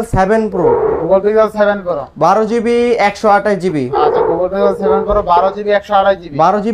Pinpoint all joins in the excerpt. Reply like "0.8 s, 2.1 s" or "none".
none